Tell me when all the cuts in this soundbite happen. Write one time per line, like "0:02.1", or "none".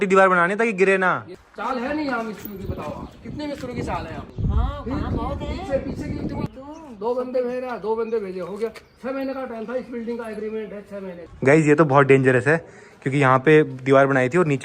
0:01.4
0:04.3
0:06.5
0:11.3